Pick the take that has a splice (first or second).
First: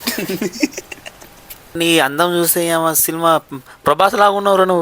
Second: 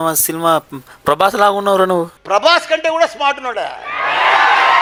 first